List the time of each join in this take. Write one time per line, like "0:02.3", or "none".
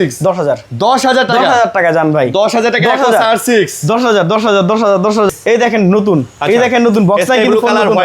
0:05.3